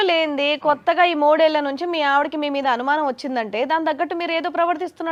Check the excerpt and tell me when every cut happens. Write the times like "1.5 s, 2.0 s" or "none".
none